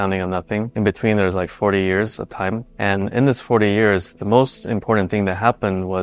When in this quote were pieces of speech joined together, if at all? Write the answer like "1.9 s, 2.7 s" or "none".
2.7 s